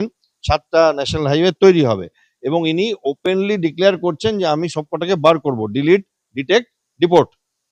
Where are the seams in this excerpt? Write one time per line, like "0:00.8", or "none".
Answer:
none